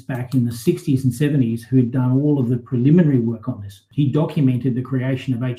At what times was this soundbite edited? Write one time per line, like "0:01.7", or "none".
0:03.8